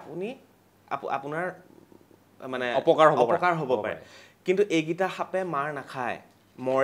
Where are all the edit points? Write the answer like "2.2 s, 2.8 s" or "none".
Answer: none